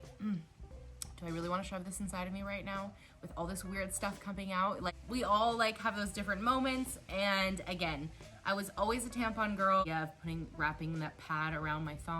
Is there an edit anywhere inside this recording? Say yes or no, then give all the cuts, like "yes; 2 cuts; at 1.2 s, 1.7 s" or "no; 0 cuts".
yes; 2 cuts; at 5.0 s, 9.8 s